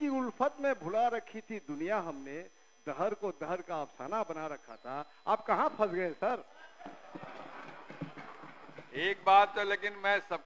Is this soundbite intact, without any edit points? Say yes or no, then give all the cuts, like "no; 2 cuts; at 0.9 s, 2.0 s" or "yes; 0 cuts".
yes; 0 cuts